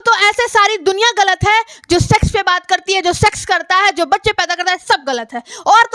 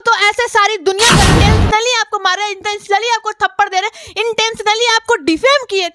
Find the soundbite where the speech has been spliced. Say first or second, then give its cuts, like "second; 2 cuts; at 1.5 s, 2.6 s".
second; 1 cut; at 1.3 s